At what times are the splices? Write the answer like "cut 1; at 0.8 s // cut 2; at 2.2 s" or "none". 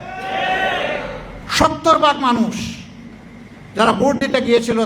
cut 1; at 1.4 s